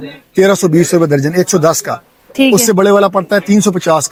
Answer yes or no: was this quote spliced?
no